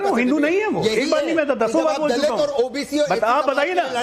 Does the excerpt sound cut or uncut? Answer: uncut